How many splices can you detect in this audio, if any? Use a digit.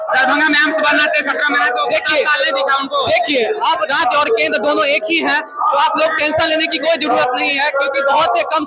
0